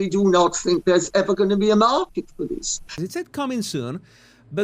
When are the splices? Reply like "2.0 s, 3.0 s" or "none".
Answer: 2.9 s

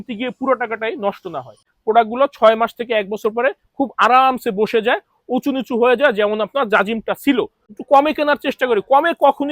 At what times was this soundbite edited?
1.6 s, 7.6 s

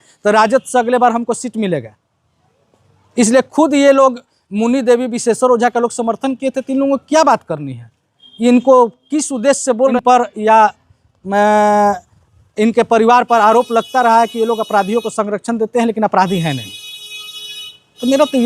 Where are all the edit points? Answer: 9.9 s

